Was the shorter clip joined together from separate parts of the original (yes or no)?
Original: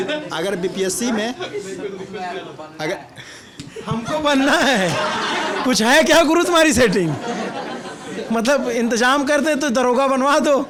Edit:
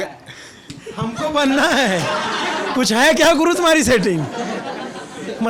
no